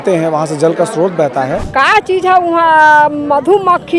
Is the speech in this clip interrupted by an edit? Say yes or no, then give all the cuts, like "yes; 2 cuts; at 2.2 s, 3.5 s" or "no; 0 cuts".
yes; 1 cut; at 1.6 s